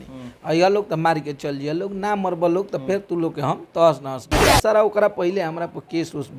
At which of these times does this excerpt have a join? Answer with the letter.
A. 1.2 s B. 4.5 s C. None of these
B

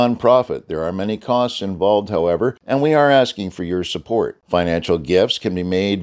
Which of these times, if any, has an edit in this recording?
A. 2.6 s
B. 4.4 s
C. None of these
A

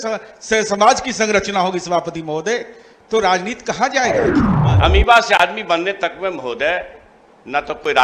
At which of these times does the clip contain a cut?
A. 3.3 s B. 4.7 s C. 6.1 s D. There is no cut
B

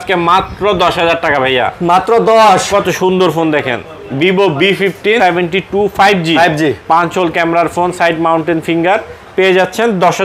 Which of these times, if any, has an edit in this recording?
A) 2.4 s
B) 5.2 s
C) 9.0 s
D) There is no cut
B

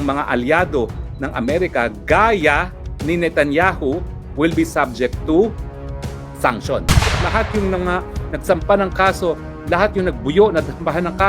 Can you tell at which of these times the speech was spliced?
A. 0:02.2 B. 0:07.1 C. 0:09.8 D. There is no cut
B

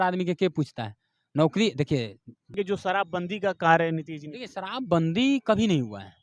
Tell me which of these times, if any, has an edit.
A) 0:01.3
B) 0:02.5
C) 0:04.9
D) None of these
B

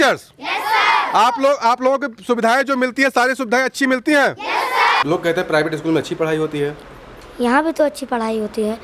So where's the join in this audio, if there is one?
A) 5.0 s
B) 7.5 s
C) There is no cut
A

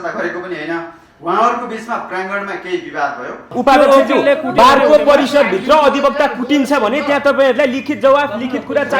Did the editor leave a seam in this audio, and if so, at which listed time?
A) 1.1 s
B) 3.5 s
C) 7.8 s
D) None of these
B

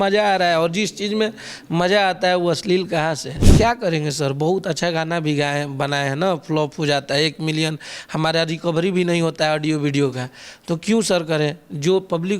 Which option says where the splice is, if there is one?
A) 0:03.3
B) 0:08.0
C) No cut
A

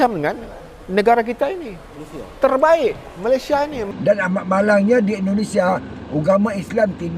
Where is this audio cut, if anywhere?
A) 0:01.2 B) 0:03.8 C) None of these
B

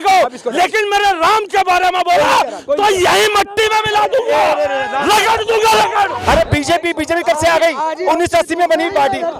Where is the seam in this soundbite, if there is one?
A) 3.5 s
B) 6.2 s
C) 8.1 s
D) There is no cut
B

